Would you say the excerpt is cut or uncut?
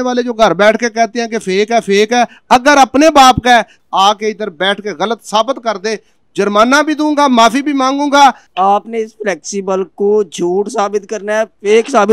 cut